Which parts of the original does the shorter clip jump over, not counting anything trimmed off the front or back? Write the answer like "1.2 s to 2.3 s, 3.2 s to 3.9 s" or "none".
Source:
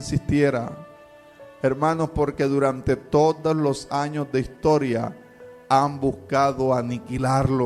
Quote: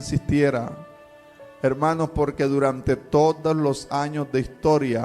none